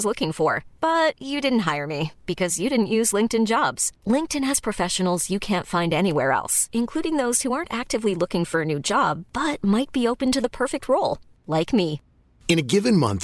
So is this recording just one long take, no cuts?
yes; 0 cuts

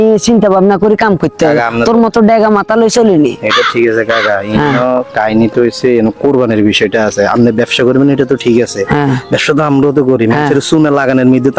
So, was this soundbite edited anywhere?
no; 0 cuts

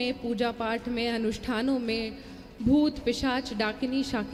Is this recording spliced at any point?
no; 0 cuts

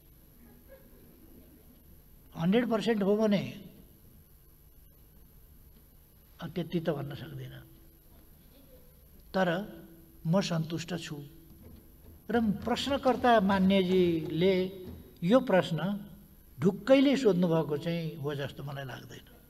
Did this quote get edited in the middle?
no; 0 cuts

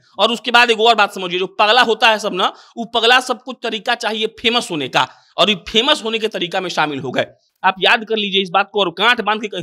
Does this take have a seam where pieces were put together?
no; 0 cuts

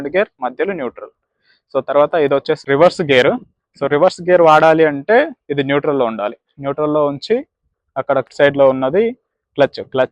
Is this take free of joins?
yes; 0 cuts

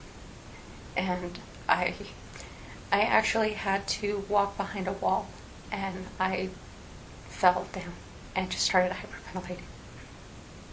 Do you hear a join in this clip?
yes; 1 cut; at 2.2 s

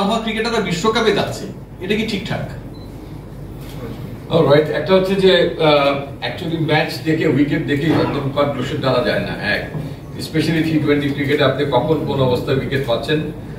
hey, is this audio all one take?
yes; 0 cuts

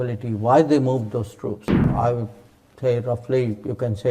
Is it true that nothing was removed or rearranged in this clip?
no; 1 cut; at 1.9 s

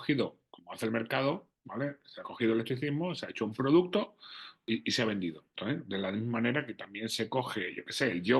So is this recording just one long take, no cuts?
no; 2 cuts; at 4.6 s, 5.5 s

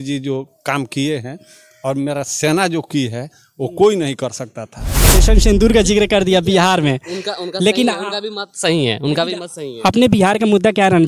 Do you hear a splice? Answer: yes; 1 cut; at 5.2 s

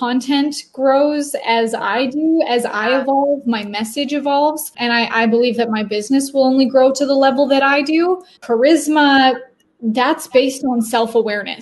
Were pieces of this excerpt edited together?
yes; 2 cuts; at 4.7 s, 8.4 s

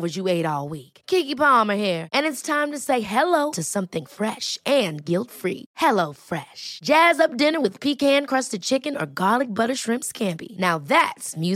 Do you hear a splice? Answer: no; 0 cuts

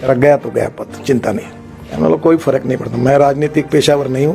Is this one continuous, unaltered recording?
no; 1 cut; at 1.8 s

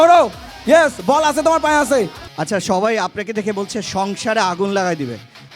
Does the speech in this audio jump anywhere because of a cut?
yes; 1 cut; at 2.3 s

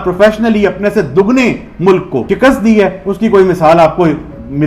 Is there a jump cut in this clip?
yes; 1 cut; at 2.2 s

